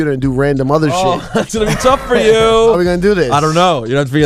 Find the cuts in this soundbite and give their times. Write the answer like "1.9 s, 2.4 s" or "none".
1.9 s